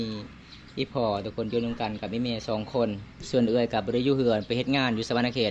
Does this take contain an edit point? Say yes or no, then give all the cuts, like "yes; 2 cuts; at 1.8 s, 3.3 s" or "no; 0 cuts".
yes; 1 cut; at 3.1 s